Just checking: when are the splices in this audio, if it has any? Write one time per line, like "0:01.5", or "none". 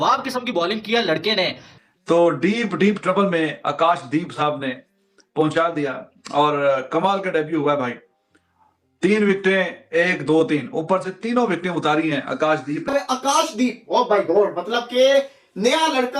0:01.7
0:12.9